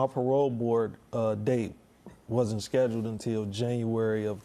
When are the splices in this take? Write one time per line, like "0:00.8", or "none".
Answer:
none